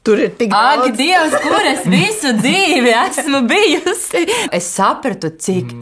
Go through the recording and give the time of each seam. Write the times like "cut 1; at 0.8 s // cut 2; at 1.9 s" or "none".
cut 1; at 4.5 s